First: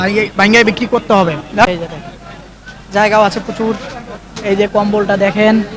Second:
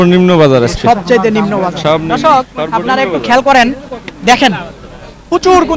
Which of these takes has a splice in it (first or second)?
first